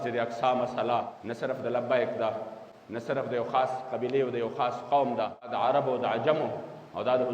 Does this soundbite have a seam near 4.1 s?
no; 2 cuts; at 1.2 s, 5.5 s

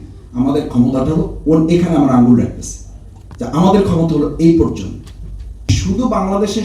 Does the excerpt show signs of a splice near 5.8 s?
yes; 1 cut; at 5.8 s

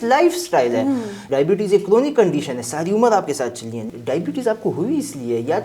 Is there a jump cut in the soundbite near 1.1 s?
yes; 2 cuts; at 1.1 s, 3.8 s

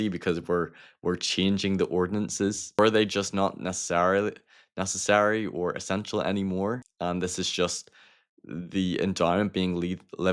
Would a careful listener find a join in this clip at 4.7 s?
no; 2 cuts; at 2.8 s, 6.9 s

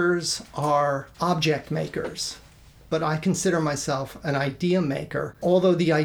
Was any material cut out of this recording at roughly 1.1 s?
yes; 1 cut; at 1.1 s

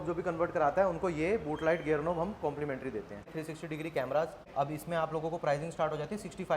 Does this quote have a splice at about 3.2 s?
yes; 2 cuts; at 3.2 s, 4.5 s

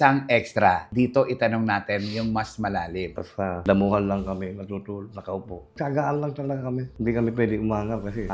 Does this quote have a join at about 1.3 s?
no; 2 cuts; at 3.1 s, 6.9 s

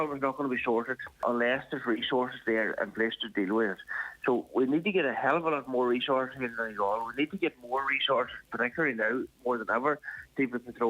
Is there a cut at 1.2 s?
yes; 1 cut; at 1.2 s

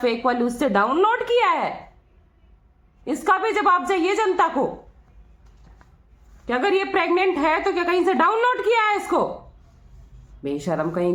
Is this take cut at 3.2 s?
no; 0 cuts

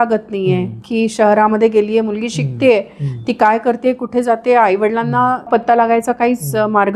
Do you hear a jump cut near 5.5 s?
yes; 1 cut; at 5.5 s

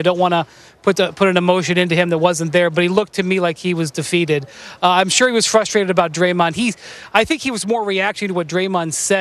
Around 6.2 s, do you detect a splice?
no; 1 cut; at 1.9 s

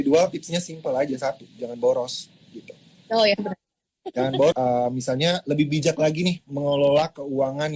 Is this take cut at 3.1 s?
no; 1 cut; at 4.5 s

